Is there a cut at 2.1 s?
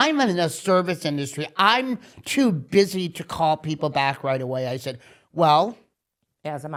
no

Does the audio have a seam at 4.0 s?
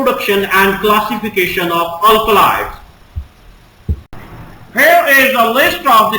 yes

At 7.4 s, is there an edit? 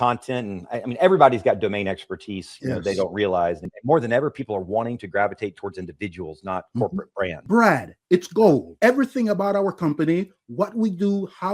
yes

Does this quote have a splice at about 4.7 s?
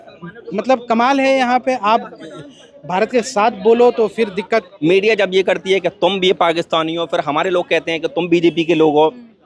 yes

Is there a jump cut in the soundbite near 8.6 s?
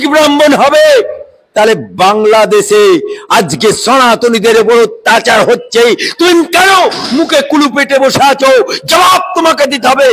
no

